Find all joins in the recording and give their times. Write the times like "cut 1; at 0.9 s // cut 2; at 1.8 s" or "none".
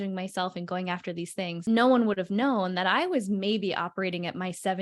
cut 1; at 1.6 s

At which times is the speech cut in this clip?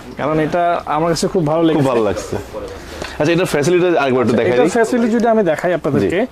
none

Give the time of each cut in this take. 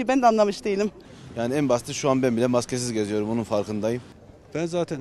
cut 1; at 1.0 s // cut 2; at 4.1 s

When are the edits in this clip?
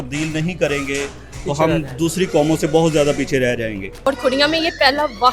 cut 1; at 4.1 s

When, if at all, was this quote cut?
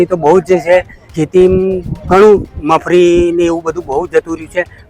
cut 1; at 1.0 s

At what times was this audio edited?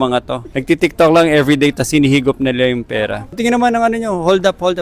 none

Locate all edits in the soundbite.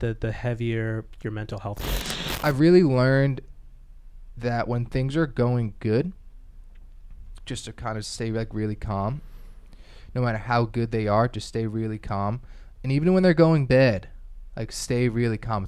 cut 1; at 2.1 s

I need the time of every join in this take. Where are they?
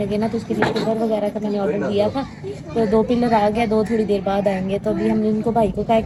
none

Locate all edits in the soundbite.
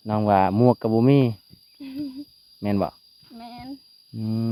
none

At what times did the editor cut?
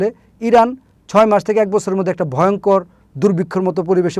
none

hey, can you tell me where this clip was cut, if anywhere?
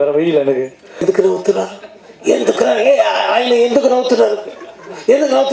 cut 1; at 1.0 s

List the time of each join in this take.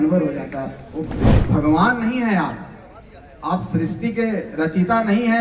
cut 1; at 1.1 s

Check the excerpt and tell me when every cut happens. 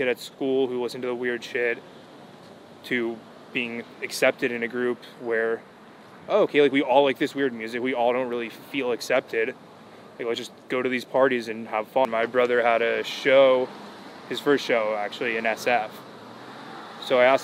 cut 1; at 12.1 s

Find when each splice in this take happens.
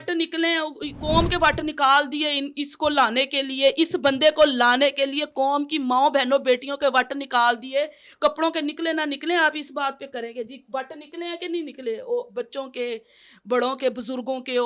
none

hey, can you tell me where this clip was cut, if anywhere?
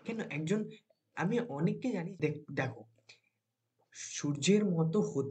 cut 1; at 2.0 s

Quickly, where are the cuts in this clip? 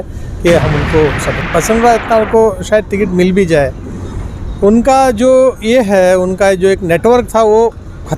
cut 1; at 1.5 s

